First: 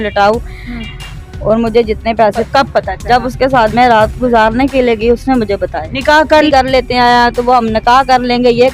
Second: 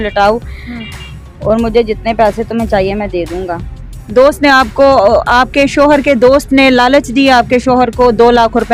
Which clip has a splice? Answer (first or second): first